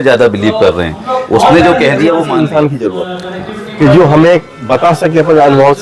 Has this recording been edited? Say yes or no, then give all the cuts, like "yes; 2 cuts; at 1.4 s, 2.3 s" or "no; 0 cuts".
yes; 1 cut; at 2.3 s